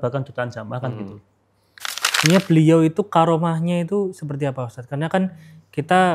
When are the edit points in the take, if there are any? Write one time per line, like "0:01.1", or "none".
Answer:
0:02.0